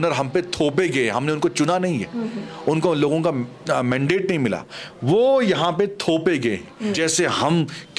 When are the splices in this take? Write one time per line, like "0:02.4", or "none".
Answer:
0:07.0